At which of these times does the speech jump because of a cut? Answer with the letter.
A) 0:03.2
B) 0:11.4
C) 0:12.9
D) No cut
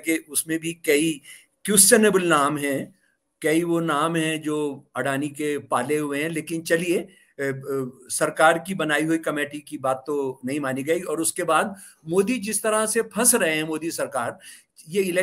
D